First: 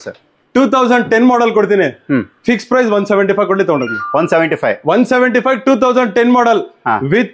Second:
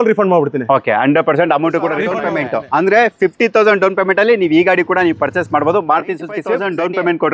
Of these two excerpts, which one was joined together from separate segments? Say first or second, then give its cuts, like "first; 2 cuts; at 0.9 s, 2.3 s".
second; 2 cuts; at 2.2 s, 6.5 s